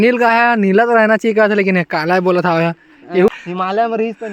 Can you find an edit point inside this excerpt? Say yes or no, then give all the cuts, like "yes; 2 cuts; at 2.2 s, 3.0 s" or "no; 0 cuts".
yes; 1 cut; at 3.3 s